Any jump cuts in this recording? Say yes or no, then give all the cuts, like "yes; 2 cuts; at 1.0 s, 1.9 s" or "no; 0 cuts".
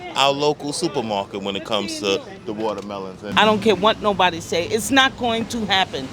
yes; 1 cut; at 3.3 s